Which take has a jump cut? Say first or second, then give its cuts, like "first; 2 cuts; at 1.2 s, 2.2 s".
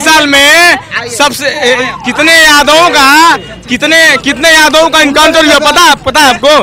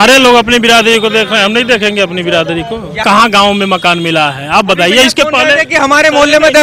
second; 1 cut; at 3.0 s